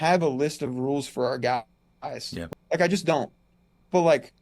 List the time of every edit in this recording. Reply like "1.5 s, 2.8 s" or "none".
2.4 s